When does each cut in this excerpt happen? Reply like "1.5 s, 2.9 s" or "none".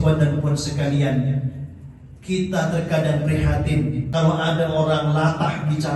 4.0 s

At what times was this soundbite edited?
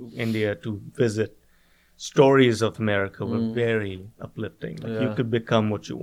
2.8 s

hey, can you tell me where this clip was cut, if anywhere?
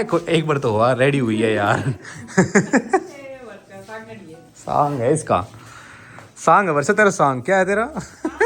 none

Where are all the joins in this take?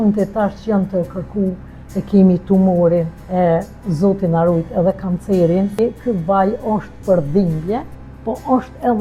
3.2 s, 5.8 s

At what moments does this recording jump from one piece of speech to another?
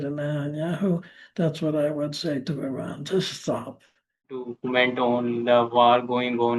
4.5 s

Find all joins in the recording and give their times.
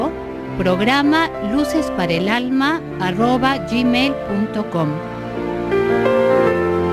none

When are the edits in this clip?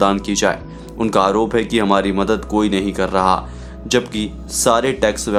none

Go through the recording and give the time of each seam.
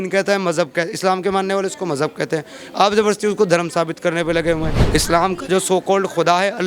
4.8 s

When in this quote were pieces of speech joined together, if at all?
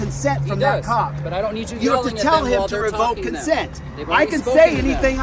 none

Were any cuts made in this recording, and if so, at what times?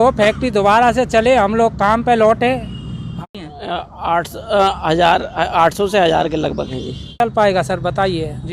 3.2 s, 7.2 s

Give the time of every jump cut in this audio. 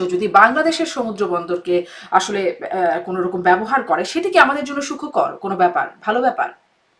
none

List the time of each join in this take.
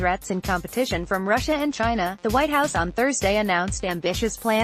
none

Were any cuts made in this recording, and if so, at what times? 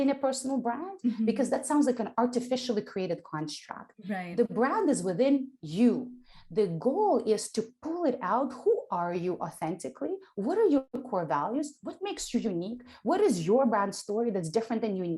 10.9 s

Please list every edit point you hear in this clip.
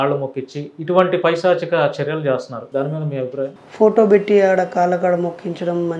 2.6 s, 3.6 s

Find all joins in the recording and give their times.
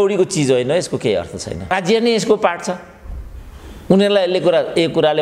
1.7 s

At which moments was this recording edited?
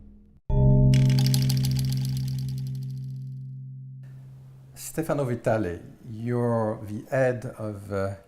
4.9 s

